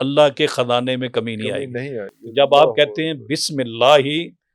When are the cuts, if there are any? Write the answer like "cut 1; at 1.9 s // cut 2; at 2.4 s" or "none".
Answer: none